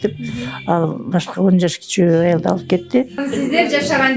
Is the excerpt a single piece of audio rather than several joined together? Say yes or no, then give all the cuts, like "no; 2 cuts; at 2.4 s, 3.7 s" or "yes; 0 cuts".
no; 1 cut; at 3.2 s